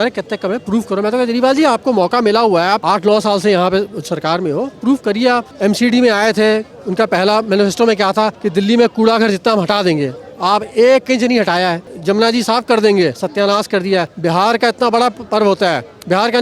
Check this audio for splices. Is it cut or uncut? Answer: cut